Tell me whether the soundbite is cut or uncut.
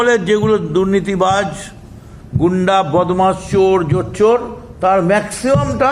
uncut